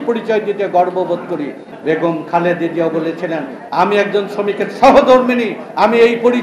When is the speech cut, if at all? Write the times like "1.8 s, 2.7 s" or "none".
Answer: 1.7 s